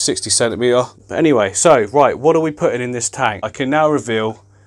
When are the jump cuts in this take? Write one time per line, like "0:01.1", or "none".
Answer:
0:01.0
0:03.5